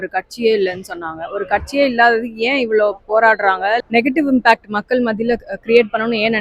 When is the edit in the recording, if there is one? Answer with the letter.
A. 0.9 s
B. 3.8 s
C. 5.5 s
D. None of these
B